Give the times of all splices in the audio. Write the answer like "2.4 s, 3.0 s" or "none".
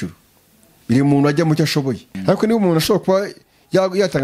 2.1 s